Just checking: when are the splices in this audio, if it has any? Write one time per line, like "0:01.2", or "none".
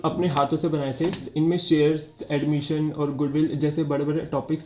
0:01.2